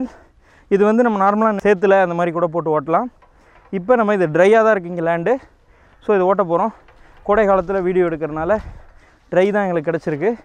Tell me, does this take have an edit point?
no; 0 cuts

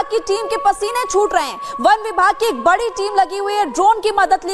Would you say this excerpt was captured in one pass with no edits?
yes; 0 cuts

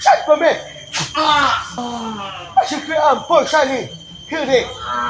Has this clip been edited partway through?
yes; 1 cut; at 1.8 s

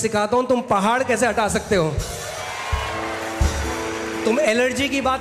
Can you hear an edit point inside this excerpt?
no; 0 cuts

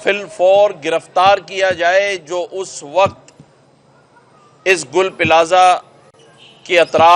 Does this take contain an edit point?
no; 0 cuts

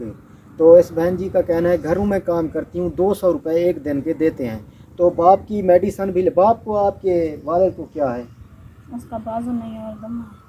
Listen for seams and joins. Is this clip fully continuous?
yes; 0 cuts

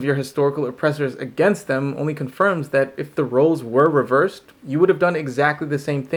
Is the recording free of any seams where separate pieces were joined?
yes; 0 cuts

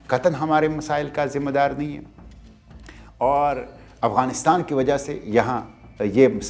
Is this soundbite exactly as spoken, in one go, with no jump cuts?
yes; 0 cuts

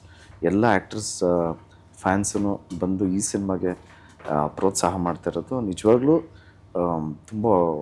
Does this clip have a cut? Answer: no; 0 cuts

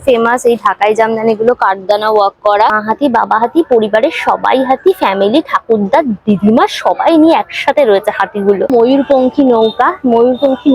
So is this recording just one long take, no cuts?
no; 2 cuts; at 2.8 s, 8.7 s

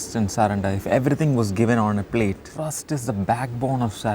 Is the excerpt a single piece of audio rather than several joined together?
no; 1 cut; at 2.5 s

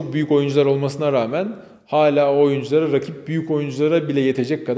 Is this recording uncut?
yes; 0 cuts

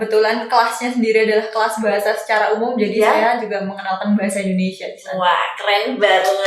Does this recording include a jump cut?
no; 0 cuts

